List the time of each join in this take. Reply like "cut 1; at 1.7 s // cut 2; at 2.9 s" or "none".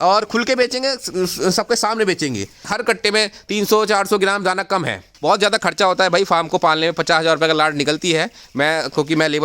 cut 1; at 2.7 s // cut 2; at 5.1 s